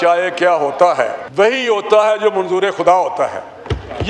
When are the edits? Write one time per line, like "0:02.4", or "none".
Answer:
0:01.2